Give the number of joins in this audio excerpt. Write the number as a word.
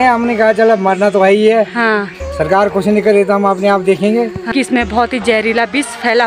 one